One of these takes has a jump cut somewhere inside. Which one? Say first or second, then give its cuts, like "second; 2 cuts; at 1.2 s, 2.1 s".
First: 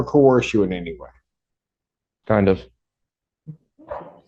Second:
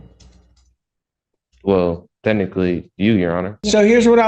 second; 1 cut; at 3.1 s